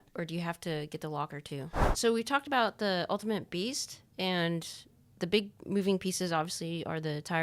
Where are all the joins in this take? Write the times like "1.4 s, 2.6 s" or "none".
1.8 s